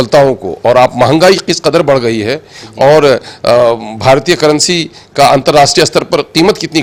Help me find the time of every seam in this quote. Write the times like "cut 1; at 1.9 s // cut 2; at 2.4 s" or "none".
none